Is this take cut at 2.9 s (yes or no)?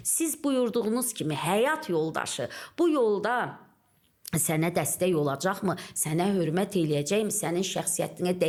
no